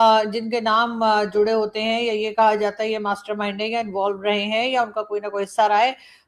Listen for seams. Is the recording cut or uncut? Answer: uncut